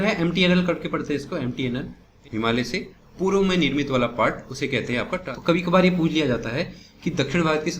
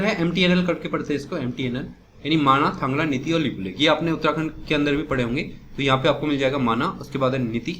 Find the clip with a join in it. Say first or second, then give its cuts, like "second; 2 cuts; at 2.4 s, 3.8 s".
first; 2 cuts; at 2.1 s, 5.2 s